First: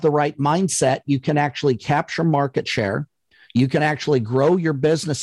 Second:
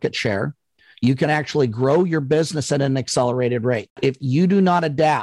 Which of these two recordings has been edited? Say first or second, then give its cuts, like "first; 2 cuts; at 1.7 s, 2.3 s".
second; 1 cut; at 3.9 s